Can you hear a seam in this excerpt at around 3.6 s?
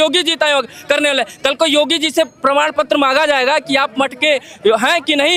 no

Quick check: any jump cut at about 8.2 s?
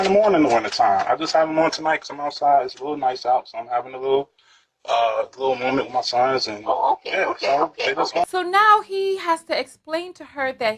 no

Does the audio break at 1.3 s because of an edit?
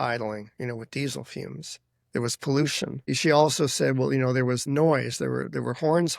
no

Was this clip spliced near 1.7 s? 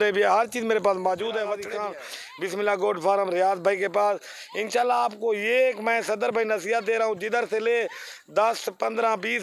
yes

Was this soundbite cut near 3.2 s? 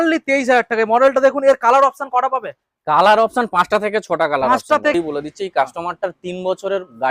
no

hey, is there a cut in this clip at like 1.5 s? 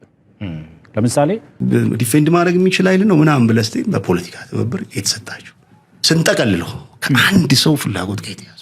yes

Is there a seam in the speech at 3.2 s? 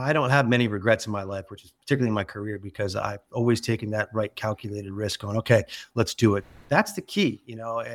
no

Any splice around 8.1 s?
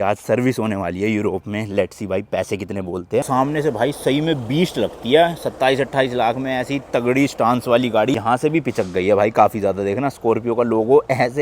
yes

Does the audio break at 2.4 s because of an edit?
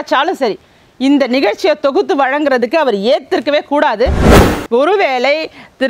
no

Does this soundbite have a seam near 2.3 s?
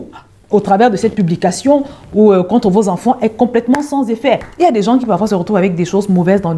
no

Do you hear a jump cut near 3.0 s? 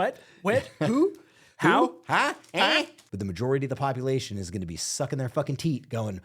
yes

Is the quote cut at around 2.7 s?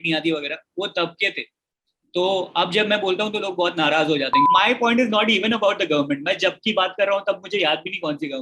no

